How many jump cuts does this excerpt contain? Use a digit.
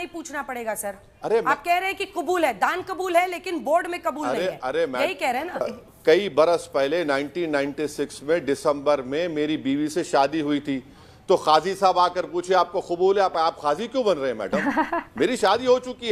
1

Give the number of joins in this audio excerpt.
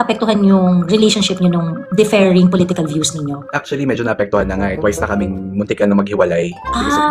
1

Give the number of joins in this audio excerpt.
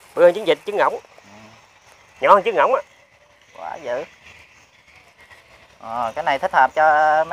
0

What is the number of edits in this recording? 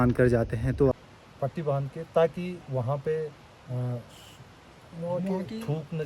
1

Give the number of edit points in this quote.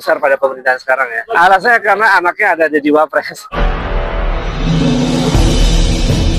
2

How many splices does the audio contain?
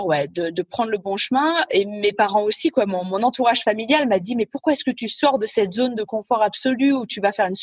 0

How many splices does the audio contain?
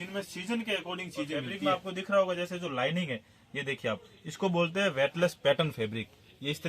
1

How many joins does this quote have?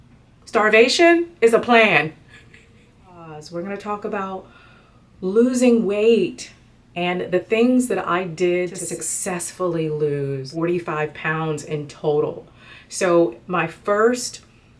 3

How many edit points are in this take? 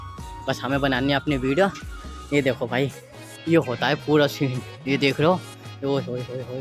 0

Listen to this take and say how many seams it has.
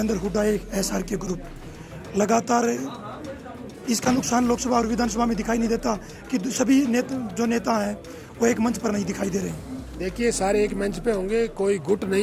0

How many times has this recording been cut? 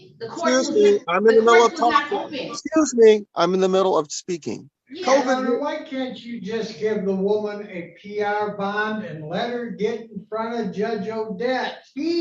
1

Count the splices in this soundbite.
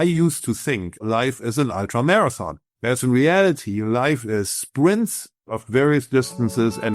2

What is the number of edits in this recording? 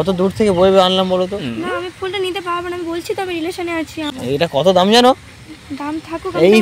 2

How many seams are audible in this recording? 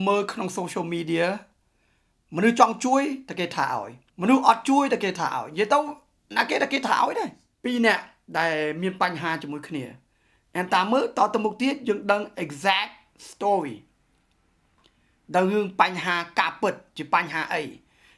1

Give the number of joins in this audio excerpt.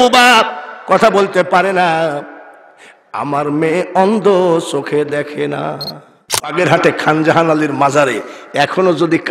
1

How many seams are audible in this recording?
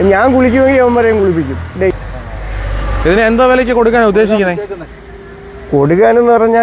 1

